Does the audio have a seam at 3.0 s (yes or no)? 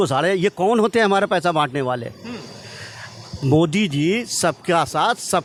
no